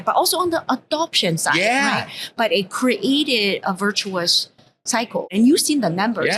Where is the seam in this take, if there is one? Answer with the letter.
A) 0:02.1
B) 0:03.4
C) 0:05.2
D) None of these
C